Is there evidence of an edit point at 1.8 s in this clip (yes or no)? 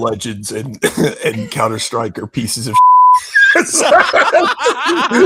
no